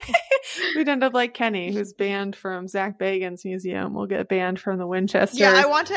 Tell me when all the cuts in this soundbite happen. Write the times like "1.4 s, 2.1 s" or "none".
none